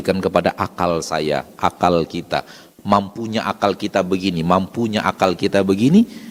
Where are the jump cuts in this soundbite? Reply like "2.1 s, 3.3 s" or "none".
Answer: none